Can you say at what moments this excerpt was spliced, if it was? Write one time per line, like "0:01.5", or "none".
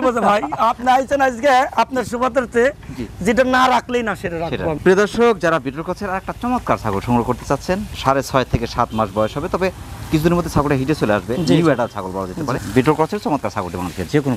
none